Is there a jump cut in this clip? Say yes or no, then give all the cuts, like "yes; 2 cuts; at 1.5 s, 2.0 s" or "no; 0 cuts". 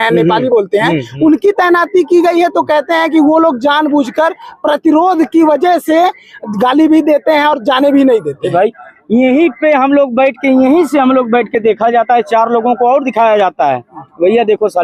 no; 0 cuts